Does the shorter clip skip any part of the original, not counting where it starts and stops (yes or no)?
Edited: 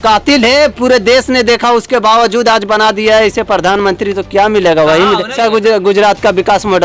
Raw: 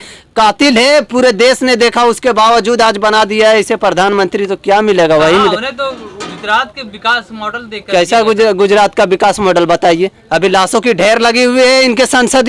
yes